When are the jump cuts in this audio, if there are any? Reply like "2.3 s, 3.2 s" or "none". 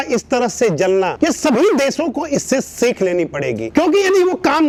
none